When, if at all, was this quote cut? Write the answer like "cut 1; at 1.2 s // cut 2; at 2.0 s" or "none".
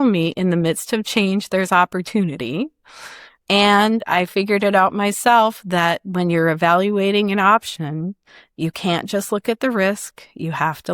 cut 1; at 3.3 s